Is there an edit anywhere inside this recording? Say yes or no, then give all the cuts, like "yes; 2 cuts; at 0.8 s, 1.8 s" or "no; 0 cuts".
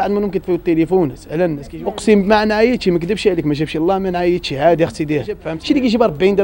yes; 2 cuts; at 1.7 s, 5.5 s